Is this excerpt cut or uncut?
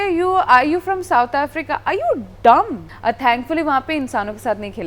cut